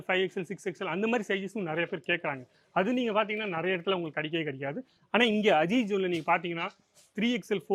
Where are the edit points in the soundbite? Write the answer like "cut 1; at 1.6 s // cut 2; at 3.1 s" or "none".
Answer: none